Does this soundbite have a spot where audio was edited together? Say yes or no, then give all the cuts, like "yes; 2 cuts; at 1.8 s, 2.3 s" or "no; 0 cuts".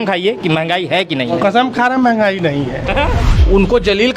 yes; 1 cut; at 3.2 s